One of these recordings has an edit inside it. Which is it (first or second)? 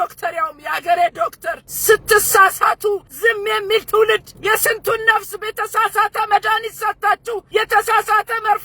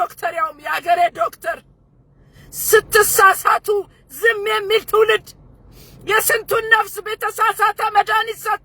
first